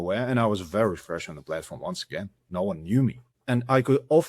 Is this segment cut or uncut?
cut